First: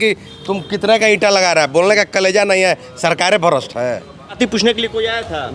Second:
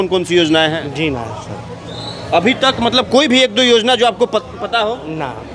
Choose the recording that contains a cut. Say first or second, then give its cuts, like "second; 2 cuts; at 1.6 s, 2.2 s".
first; 1 cut; at 4.3 s